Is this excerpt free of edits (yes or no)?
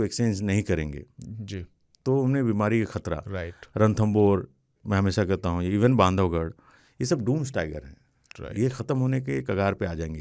yes